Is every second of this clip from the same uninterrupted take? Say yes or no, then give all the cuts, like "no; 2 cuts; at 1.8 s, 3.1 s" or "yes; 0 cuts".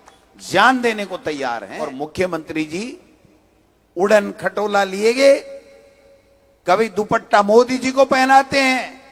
no; 1 cut; at 1.9 s